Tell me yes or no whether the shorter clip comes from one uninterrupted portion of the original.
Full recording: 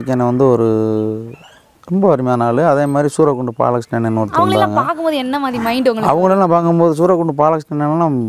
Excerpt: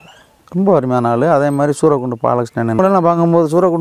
no